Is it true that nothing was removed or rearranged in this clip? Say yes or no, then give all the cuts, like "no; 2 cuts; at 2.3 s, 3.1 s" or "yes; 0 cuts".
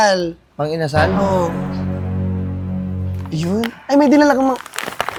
yes; 0 cuts